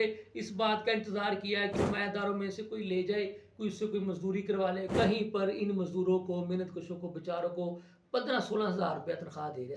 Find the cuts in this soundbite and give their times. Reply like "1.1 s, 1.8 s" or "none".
1.7 s, 4.9 s